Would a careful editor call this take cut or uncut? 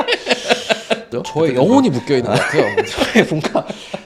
uncut